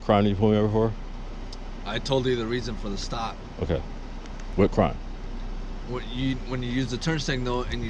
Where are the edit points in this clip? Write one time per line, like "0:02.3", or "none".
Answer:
none